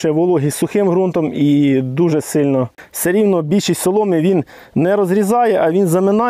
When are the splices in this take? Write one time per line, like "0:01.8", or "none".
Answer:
0:02.8